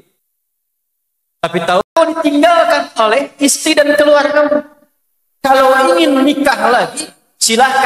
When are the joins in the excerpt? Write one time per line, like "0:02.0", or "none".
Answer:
0:01.9